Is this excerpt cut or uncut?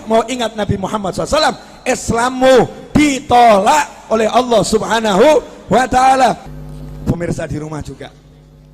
cut